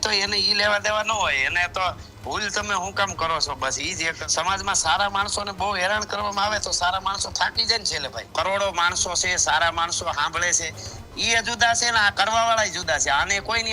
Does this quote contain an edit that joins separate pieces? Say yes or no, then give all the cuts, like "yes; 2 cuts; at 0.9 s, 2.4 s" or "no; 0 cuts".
yes; 2 cuts; at 4.2 s, 8.3 s